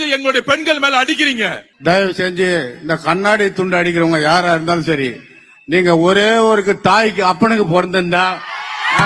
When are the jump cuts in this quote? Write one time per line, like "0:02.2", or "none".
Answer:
0:01.7